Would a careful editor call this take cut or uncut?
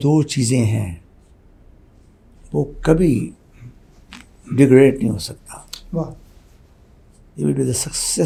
uncut